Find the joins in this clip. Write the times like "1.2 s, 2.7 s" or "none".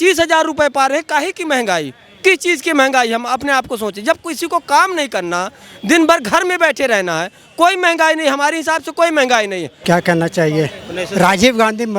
9.7 s